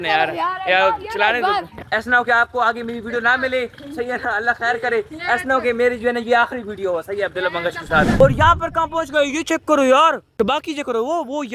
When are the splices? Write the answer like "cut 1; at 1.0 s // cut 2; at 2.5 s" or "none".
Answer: cut 1; at 1.8 s // cut 2; at 8.2 s